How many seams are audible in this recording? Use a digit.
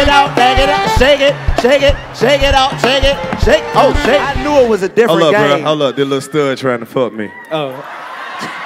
1